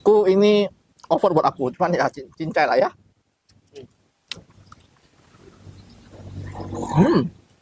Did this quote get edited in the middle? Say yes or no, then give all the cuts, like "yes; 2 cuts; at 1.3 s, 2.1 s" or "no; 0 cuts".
no; 0 cuts